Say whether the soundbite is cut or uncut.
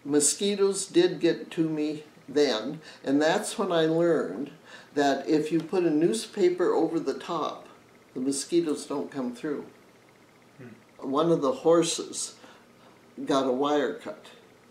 cut